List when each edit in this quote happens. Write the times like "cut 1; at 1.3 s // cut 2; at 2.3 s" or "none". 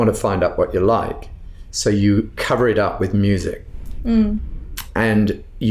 cut 1; at 2.4 s